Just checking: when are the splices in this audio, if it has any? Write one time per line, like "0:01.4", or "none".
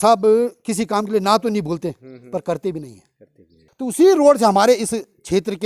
0:03.6